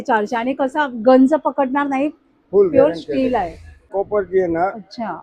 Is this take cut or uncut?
cut